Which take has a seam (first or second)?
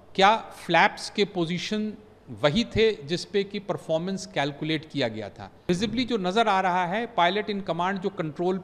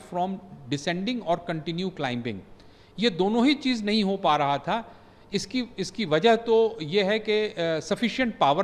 first